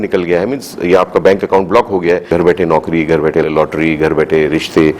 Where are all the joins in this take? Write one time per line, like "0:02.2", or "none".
0:02.3
0:03.5